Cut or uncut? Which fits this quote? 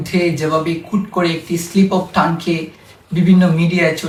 uncut